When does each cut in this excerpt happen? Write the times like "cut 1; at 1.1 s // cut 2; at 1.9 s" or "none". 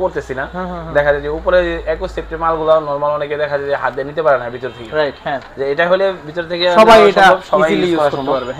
none

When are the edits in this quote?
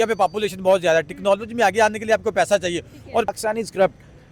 cut 1; at 3.3 s

